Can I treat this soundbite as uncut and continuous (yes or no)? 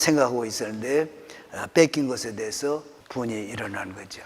no